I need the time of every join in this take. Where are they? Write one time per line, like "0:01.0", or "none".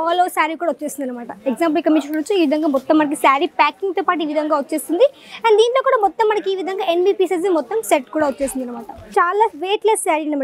0:08.9